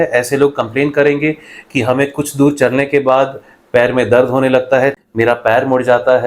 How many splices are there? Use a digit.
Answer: 1